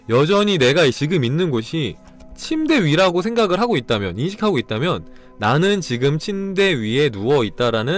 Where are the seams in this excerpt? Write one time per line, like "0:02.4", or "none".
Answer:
none